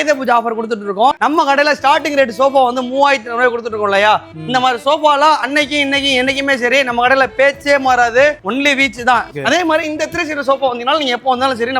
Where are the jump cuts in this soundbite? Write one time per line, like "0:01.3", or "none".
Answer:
0:01.2
0:09.3